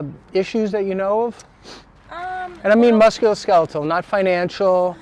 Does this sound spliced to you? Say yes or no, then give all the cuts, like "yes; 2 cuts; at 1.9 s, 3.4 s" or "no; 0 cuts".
no; 0 cuts